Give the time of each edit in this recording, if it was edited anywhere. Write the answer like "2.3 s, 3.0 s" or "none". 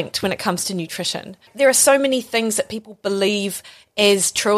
1.5 s